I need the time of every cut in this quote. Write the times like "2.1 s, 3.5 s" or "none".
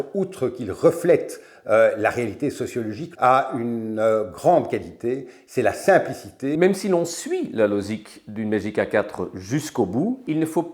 3.1 s, 6.5 s